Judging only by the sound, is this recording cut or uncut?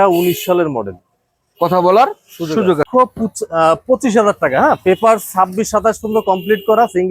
cut